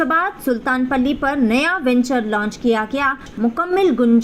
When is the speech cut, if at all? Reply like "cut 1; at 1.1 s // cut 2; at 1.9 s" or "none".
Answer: cut 1; at 3.3 s